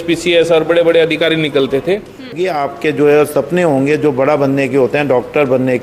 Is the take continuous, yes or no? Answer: no